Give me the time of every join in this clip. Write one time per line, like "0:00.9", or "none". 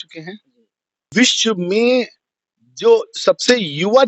0:01.0

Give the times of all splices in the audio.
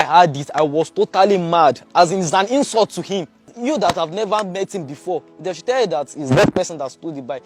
0:03.5

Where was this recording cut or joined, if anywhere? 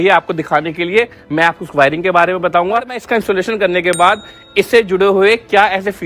0:03.0

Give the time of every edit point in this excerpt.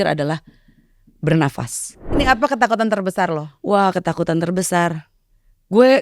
0:02.2

